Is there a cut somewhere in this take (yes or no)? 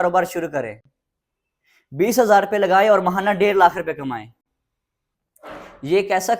no